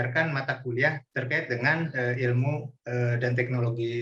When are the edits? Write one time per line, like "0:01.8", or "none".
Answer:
0:01.1
0:02.7